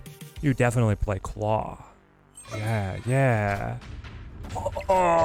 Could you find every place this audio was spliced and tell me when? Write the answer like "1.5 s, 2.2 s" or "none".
none

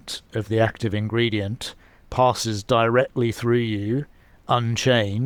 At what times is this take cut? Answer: none

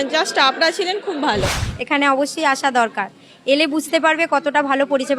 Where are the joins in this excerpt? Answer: 1.6 s

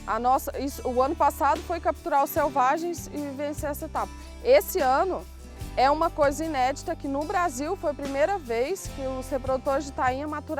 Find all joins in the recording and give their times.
none

